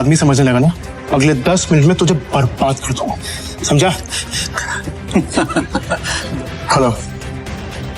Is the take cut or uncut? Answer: cut